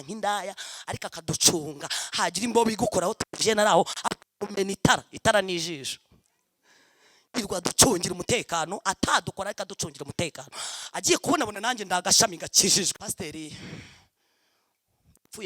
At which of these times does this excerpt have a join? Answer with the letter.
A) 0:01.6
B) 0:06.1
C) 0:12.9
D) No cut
C